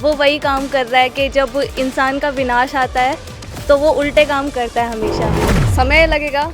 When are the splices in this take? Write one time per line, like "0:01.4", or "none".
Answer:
0:05.5